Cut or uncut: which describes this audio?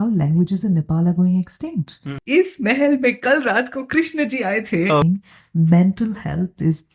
cut